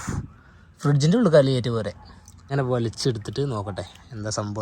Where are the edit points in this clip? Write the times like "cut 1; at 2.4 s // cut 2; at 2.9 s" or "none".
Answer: cut 1; at 2.5 s